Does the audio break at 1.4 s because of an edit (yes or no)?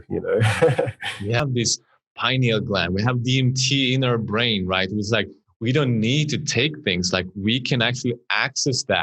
yes